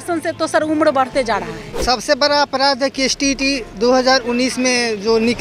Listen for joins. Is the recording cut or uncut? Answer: cut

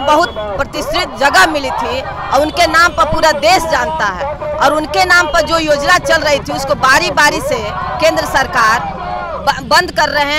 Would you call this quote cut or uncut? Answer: uncut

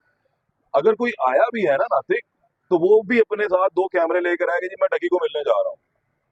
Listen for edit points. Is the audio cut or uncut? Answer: uncut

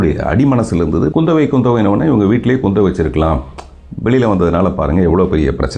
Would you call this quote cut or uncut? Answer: cut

